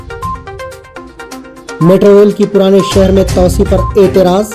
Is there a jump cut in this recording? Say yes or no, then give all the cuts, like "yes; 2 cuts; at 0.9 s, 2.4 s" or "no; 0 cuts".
yes; 1 cut; at 1.1 s